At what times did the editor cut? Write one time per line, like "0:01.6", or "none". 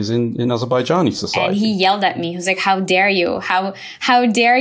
0:01.4